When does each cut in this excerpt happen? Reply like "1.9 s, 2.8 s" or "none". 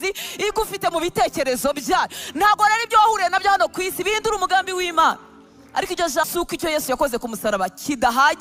6.2 s